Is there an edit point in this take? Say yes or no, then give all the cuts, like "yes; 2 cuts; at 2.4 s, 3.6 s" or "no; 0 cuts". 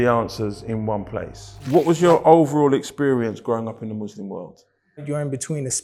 yes; 2 cuts; at 1.6 s, 5.0 s